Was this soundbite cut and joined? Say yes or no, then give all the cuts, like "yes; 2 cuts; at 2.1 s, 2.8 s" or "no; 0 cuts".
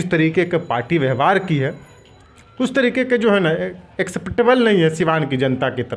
no; 0 cuts